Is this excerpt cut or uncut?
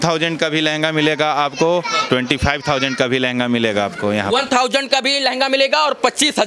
uncut